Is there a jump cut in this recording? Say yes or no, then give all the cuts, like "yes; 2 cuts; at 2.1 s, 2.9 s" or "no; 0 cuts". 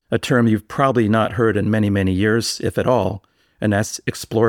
no; 0 cuts